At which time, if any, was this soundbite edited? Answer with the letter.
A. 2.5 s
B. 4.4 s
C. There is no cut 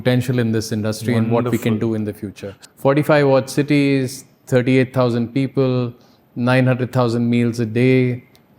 A